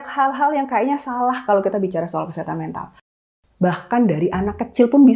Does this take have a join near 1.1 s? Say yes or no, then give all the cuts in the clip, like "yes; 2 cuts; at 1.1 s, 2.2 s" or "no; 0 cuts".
no; 1 cut; at 3.2 s